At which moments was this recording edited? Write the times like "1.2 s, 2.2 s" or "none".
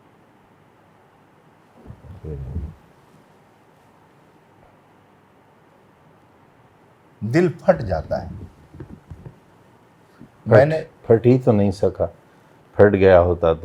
6.2 s